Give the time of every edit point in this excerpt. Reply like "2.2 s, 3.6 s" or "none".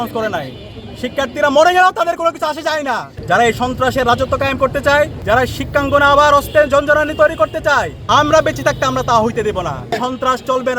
3.1 s, 5.2 s, 8.0 s, 10.0 s